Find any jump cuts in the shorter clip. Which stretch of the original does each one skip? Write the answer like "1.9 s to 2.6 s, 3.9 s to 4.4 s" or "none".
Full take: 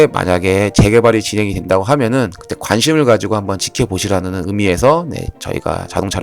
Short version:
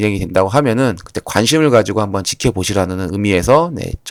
none